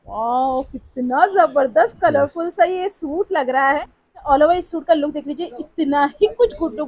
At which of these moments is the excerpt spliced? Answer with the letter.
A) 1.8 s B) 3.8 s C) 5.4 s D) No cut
B